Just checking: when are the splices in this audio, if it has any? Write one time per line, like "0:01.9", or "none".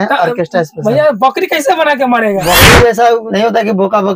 0:02.4